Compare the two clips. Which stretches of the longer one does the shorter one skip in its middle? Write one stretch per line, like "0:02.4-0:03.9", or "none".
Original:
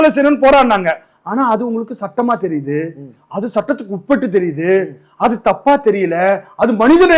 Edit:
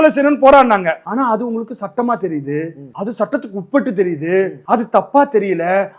0:01.0-0:01.2
0:03.0-0:03.2
0:04.9-0:05.1